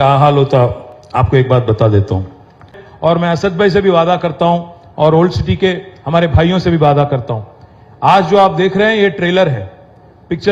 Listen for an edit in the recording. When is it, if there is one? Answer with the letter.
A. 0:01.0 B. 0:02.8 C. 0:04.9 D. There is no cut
B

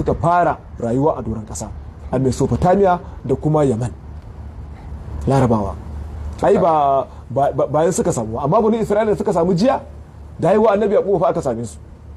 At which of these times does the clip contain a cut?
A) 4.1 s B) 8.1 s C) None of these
C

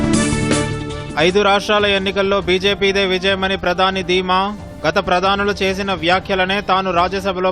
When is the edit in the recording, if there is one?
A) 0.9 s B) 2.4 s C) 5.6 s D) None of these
A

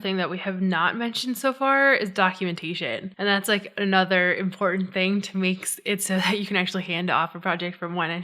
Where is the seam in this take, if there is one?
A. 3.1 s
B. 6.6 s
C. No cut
A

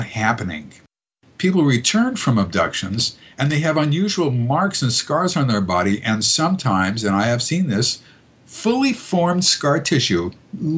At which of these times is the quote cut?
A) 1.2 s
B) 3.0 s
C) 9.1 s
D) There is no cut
D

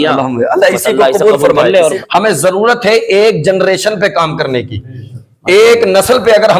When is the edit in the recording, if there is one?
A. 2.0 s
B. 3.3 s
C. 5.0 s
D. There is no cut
A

